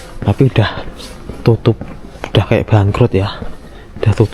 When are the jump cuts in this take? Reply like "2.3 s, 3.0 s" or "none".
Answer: none